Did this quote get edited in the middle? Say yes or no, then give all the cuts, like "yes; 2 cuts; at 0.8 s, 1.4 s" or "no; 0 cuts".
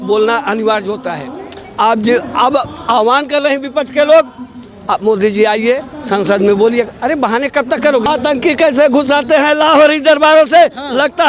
yes; 1 cut; at 8.1 s